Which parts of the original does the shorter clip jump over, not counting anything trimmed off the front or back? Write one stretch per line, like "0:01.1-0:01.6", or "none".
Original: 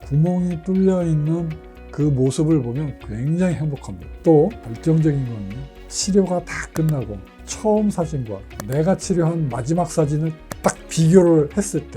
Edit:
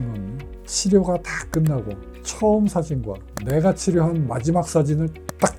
none